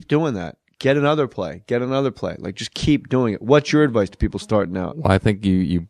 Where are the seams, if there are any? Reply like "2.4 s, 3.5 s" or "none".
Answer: 4.2 s